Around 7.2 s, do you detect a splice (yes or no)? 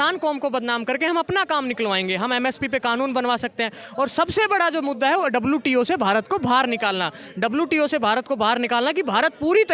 no